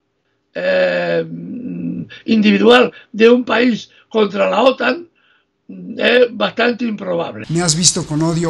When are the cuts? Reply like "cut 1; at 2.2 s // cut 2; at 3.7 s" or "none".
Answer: cut 1; at 7.4 s